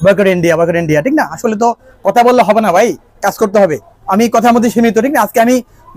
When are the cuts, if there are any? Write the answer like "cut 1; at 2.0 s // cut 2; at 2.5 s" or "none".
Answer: none